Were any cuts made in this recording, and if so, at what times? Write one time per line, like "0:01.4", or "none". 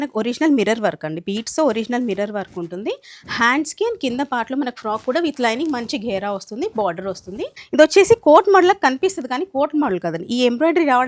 0:07.6